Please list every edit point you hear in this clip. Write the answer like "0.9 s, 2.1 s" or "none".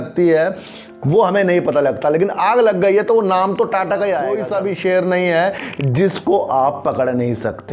4.4 s